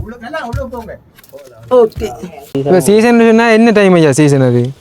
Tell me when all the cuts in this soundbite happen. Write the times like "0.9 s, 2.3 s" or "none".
2.5 s